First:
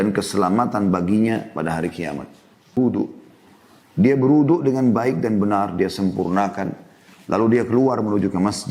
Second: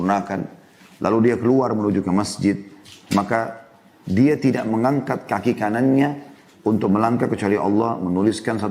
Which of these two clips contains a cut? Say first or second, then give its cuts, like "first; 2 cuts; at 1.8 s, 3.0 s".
first; 1 cut; at 2.8 s